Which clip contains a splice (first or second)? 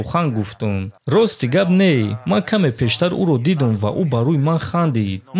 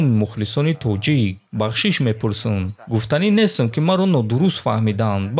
first